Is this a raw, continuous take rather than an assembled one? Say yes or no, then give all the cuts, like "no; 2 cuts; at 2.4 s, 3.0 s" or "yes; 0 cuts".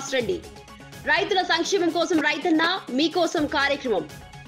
yes; 0 cuts